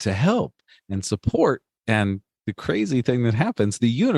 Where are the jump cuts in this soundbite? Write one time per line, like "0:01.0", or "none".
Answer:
none